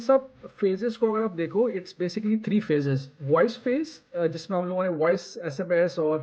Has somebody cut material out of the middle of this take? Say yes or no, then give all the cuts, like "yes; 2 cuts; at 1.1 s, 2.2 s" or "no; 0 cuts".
yes; 1 cut; at 3.1 s